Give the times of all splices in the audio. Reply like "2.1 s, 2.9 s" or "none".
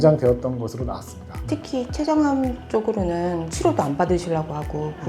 1.4 s, 3.5 s